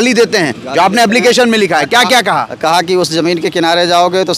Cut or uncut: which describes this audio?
uncut